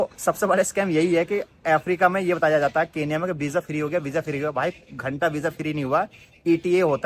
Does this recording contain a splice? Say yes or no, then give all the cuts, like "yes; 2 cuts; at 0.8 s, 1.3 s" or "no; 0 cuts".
no; 0 cuts